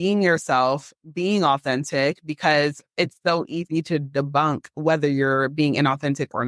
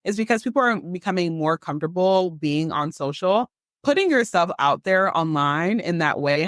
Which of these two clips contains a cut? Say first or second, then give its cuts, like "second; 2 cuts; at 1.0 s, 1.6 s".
second; 1 cut; at 3.6 s